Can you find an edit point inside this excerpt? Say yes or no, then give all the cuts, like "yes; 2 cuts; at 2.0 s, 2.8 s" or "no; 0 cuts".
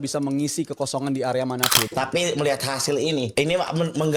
yes; 2 cuts; at 1.8 s, 3.3 s